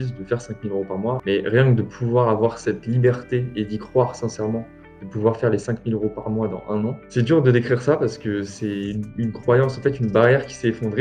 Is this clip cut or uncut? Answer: cut